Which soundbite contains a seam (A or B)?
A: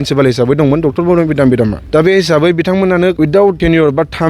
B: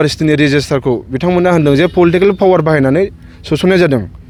A